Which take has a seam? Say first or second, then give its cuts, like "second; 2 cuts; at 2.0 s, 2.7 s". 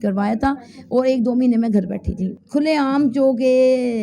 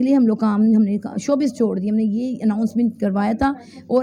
first; 1 cut; at 2.2 s